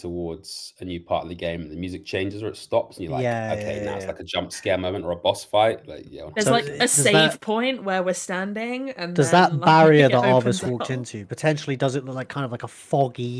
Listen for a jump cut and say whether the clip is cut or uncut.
uncut